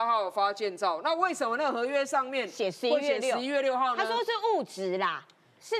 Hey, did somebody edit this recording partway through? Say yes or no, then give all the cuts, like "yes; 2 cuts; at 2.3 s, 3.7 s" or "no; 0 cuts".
no; 0 cuts